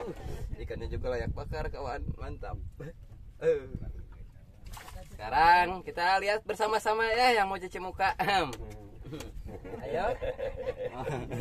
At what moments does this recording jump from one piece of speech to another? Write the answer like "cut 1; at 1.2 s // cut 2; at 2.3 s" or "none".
cut 1; at 4.7 s

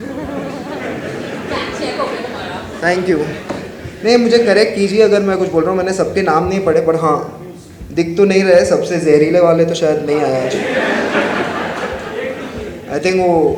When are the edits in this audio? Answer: none

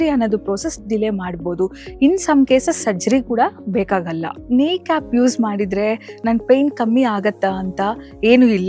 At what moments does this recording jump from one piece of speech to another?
cut 1; at 4.4 s

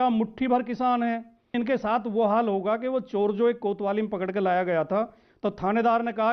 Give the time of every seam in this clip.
cut 1; at 1.5 s

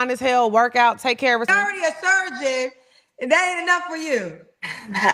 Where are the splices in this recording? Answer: cut 1; at 1.5 s

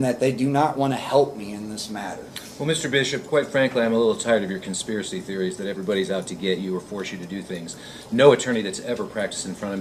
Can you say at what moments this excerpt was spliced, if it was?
none

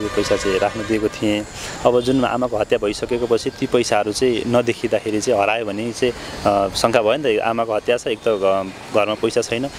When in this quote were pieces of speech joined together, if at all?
none

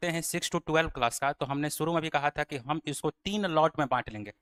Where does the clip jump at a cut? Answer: none

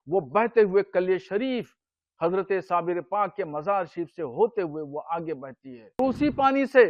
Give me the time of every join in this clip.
cut 1; at 6.0 s

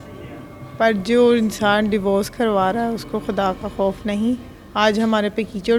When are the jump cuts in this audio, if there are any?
none

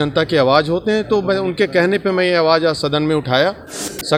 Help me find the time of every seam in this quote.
none

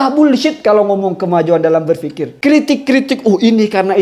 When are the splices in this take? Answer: cut 1; at 2.2 s

